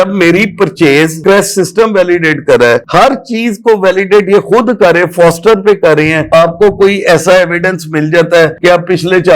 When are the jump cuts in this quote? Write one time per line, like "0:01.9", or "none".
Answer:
0:01.2
0:06.2